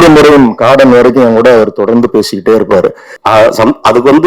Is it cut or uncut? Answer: cut